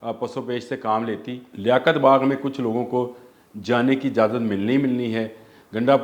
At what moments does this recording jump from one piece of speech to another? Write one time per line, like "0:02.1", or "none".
0:01.4